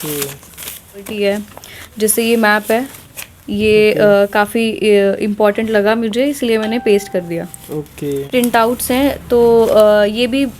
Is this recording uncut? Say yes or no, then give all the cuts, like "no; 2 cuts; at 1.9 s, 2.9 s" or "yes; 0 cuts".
no; 2 cuts; at 1.1 s, 8.3 s